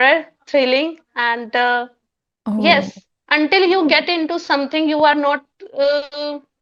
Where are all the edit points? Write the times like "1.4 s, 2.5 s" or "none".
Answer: none